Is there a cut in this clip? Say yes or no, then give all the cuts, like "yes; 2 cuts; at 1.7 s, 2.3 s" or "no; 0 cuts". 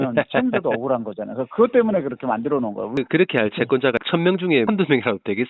yes; 2 cuts; at 3.0 s, 4.5 s